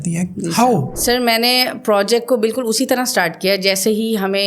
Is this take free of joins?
no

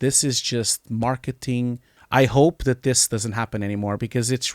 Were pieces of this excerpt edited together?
yes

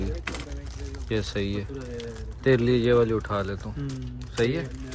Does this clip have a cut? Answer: no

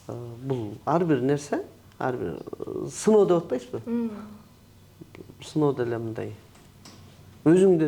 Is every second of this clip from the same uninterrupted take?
yes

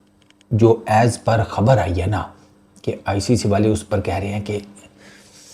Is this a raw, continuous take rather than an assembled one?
yes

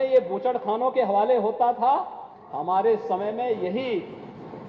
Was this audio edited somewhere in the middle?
no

